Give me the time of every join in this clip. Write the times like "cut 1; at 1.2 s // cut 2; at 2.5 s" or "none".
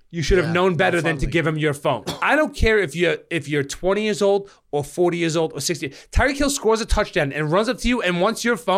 cut 1; at 2.1 s